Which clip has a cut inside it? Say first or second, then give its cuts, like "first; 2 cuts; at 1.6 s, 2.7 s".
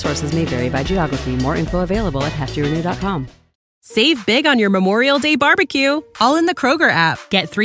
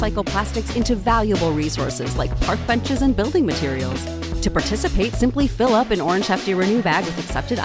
first; 1 cut; at 3.8 s